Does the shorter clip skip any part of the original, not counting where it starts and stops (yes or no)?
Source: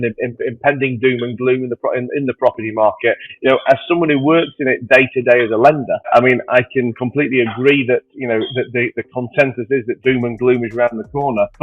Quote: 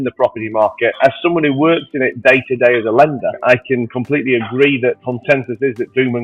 yes